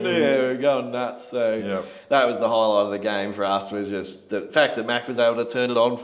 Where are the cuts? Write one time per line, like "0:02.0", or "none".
none

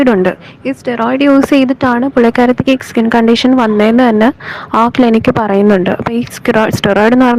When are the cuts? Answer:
none

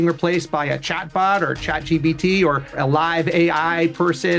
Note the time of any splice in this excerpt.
0:02.8

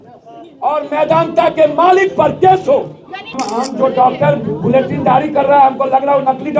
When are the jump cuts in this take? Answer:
0:03.3

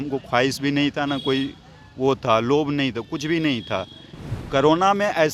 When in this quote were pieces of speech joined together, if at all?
none

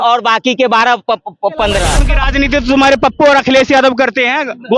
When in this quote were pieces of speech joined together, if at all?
0:02.0

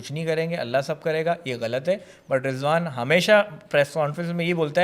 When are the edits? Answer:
none

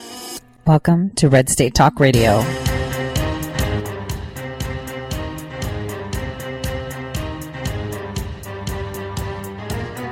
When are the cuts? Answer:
none

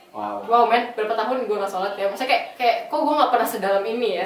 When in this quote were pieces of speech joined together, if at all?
0:02.5

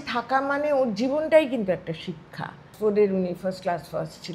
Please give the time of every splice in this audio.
0:02.7

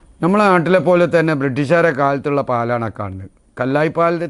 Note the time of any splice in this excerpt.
none

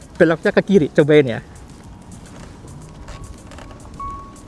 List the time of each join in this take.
none

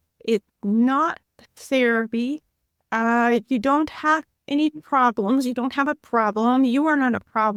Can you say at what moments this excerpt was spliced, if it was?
none

